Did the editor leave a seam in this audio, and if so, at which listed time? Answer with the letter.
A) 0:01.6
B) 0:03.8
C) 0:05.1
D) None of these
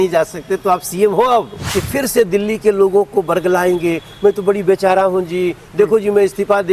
A